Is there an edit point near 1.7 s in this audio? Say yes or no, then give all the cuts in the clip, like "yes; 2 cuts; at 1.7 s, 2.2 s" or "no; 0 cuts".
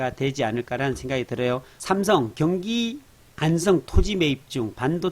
yes; 1 cut; at 1.7 s